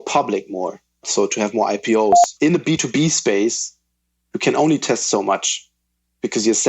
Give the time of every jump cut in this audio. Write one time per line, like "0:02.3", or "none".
0:01.0
0:02.3